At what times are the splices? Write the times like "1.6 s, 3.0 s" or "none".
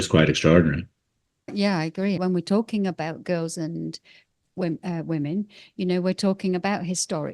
1.5 s, 2.2 s